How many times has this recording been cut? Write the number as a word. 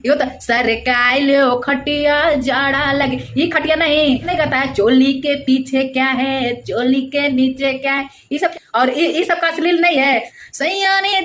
two